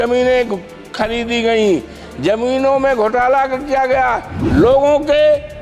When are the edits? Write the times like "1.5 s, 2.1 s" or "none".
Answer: 4.3 s